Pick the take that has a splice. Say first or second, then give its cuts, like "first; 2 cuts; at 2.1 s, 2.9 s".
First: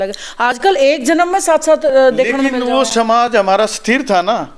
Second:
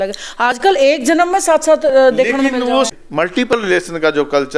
second; 1 cut; at 2.9 s